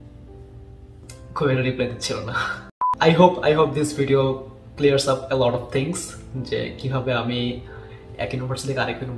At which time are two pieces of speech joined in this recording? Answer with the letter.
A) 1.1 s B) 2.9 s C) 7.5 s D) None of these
B